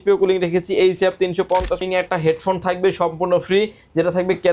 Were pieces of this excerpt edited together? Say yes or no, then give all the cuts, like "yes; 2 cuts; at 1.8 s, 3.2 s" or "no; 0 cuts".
yes; 1 cut; at 1.8 s